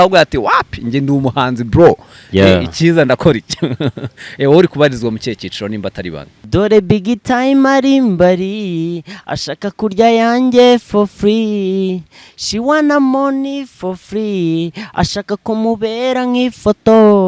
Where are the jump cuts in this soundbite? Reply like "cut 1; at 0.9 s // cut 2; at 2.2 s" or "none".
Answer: cut 1; at 6.5 s